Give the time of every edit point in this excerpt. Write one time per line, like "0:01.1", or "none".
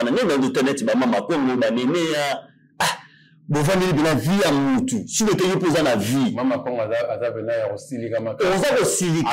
none